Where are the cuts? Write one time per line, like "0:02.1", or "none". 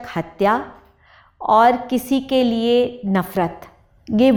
none